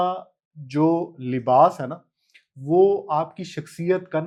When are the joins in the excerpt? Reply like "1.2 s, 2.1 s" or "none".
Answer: none

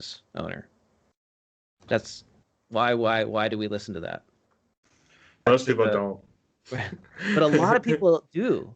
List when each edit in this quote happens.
5.5 s

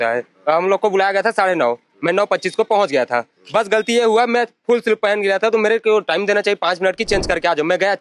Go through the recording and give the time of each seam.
none

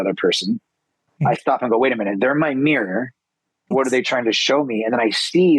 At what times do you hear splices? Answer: 3.7 s

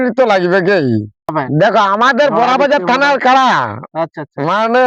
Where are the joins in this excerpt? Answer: 1.4 s

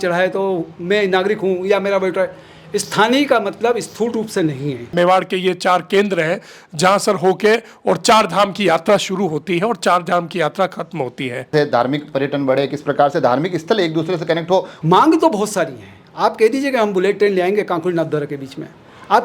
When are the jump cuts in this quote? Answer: 4.9 s, 11.5 s, 14.7 s

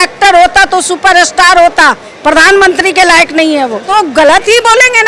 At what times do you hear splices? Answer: 3.9 s

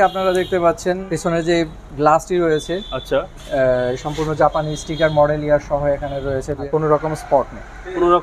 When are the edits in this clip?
1.1 s, 6.7 s

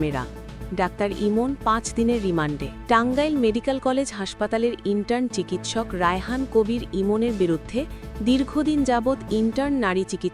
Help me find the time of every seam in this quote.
2.7 s

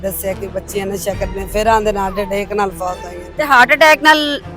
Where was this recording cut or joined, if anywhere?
3.2 s

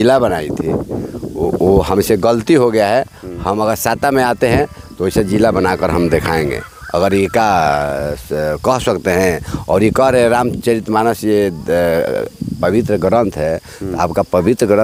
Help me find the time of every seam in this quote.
none

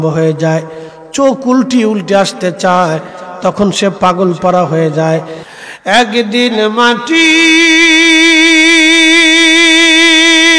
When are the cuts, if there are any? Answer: 5.4 s

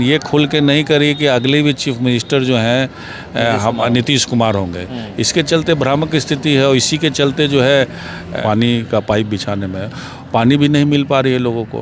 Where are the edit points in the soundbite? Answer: 8.4 s

